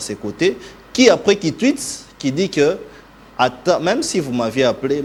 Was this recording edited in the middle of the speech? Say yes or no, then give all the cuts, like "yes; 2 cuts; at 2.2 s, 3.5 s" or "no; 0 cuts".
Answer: no; 0 cuts